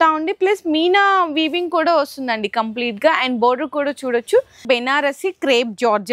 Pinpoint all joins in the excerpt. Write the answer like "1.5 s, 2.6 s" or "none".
4.6 s